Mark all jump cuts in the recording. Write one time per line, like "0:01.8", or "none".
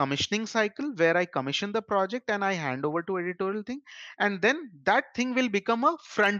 none